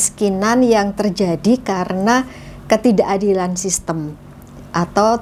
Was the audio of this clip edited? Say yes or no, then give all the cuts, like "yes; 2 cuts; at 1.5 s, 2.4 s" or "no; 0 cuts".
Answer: no; 0 cuts